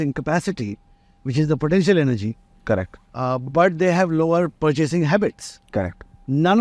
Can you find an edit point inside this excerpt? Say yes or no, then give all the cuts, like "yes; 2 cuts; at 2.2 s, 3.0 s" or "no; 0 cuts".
yes; 1 cut; at 4.5 s